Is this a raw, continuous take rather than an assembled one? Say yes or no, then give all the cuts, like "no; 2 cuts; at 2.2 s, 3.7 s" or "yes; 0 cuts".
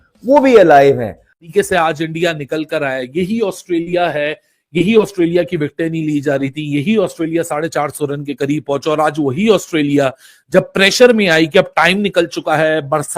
no; 1 cut; at 1.4 s